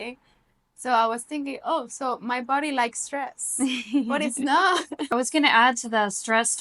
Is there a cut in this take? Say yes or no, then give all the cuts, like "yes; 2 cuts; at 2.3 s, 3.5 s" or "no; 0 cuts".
yes; 1 cut; at 5.1 s